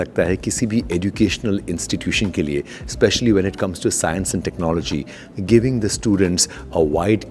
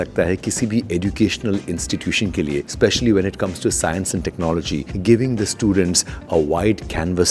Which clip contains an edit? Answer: second; 2 cuts; at 2.7 s, 4.9 s

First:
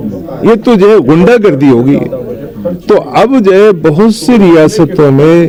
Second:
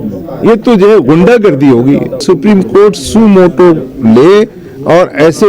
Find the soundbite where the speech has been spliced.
second; 1 cut; at 2.2 s

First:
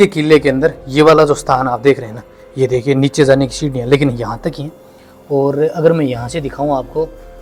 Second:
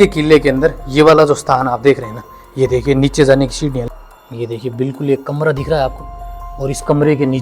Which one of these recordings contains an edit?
second; 1 cut; at 3.8 s

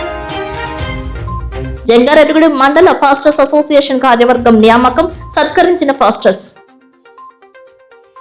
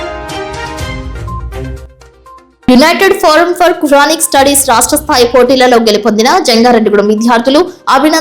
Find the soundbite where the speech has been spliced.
second; 1 cut; at 1.7 s

